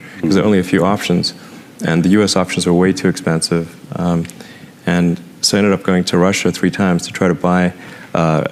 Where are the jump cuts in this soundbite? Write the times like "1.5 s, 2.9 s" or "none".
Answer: none